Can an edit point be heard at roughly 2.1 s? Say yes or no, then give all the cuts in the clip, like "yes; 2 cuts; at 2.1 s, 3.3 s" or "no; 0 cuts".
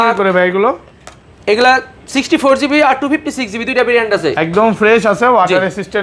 no; 0 cuts